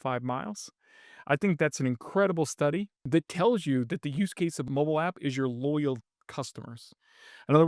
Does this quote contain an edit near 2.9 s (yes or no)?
yes